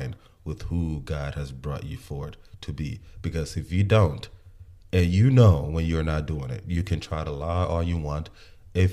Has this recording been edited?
no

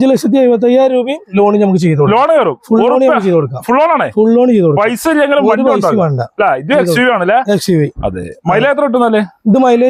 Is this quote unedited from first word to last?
yes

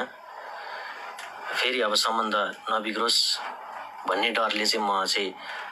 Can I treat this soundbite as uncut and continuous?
yes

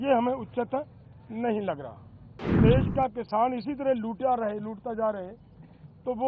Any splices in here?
yes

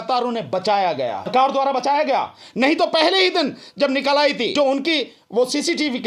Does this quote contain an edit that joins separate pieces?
yes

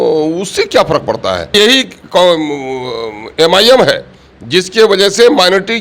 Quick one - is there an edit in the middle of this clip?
yes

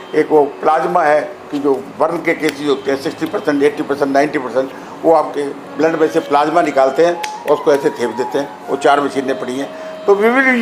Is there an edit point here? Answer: no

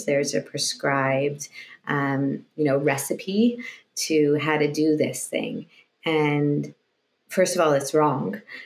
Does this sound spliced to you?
no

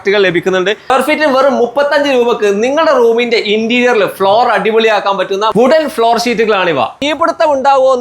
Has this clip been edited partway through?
yes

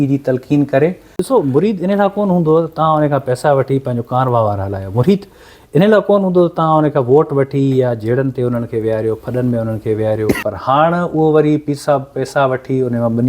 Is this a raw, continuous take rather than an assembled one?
no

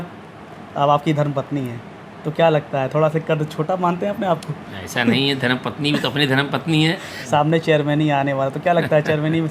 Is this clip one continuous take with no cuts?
no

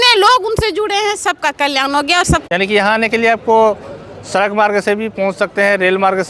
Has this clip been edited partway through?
yes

